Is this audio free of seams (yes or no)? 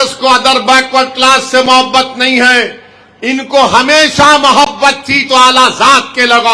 yes